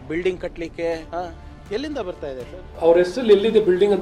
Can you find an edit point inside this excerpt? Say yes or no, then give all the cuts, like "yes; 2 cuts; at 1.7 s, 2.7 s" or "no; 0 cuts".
no; 0 cuts